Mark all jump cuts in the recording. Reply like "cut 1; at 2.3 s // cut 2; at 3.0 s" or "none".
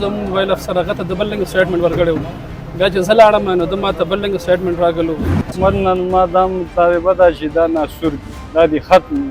cut 1; at 5.2 s